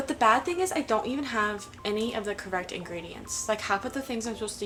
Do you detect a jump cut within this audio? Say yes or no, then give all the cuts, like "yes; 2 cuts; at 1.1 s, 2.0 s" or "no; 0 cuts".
no; 0 cuts